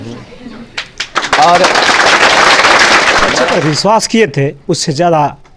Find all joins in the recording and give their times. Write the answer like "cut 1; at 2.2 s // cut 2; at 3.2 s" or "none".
cut 1; at 3.4 s